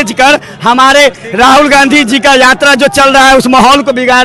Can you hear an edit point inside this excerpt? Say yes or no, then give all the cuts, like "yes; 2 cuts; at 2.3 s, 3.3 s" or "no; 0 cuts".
no; 0 cuts